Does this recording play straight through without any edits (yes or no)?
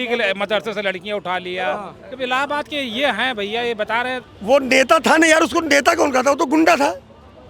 no